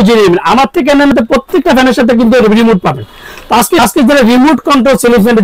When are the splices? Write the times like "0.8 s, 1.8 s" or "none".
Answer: 1.1 s, 3.8 s